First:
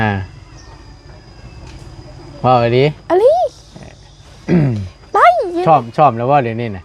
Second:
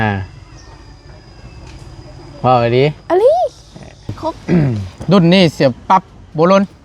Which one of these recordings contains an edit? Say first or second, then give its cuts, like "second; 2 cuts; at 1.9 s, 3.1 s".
second; 1 cut; at 4.9 s